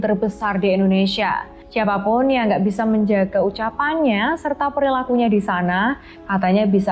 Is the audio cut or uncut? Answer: cut